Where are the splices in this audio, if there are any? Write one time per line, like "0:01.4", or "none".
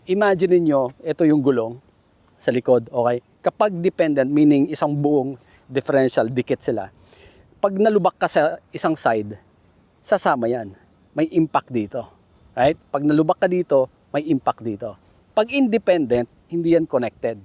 none